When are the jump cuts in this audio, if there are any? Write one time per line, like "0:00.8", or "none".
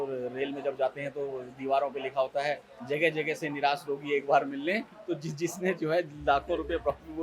none